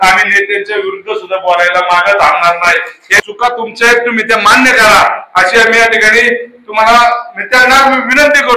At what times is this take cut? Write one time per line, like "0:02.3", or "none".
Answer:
0:03.1